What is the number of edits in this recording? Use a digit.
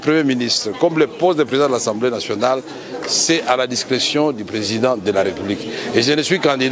0